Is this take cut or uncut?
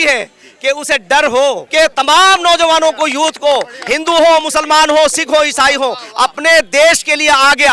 cut